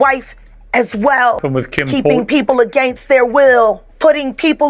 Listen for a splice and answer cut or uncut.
cut